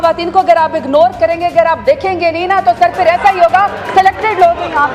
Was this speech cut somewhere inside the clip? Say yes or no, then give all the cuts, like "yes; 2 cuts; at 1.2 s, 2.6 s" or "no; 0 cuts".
no; 0 cuts